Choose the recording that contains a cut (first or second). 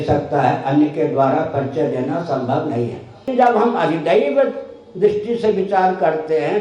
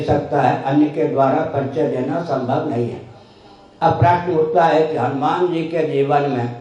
first